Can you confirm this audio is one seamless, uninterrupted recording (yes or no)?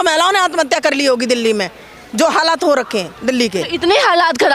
yes